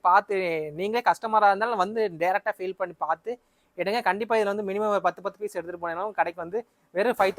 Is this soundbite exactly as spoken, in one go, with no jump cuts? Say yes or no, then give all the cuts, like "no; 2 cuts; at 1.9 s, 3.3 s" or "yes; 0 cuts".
yes; 0 cuts